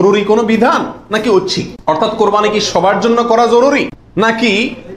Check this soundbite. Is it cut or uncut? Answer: cut